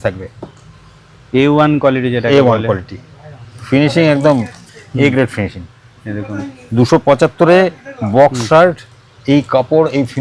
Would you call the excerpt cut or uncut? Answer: uncut